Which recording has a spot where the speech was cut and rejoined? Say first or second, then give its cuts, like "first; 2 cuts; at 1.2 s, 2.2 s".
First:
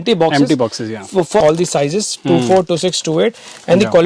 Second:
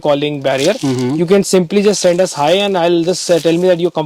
first; 1 cut; at 1.4 s